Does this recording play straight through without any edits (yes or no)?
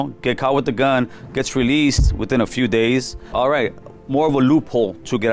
no